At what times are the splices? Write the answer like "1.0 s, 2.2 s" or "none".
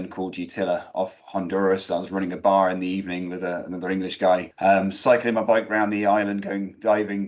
4.5 s